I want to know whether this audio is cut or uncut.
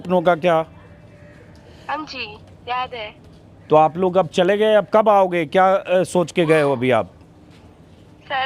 uncut